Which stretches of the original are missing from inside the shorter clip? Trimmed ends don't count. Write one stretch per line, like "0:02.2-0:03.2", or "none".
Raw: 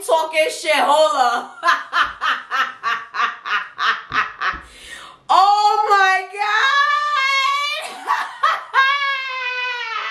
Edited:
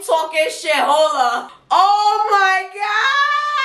0:01.5-0:05.1